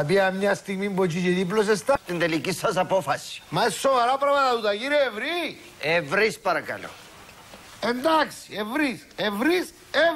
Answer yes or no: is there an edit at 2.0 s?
yes